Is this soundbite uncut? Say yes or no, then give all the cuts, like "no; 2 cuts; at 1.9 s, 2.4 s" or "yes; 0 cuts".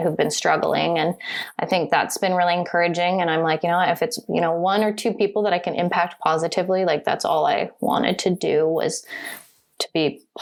yes; 0 cuts